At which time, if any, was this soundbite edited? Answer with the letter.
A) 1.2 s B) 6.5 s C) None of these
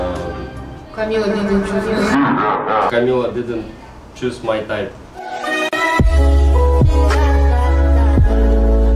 C